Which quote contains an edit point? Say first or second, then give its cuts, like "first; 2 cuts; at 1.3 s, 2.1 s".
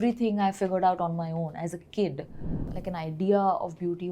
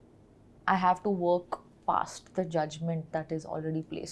first; 1 cut; at 2.8 s